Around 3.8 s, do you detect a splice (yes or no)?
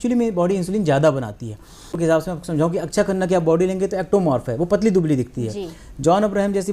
no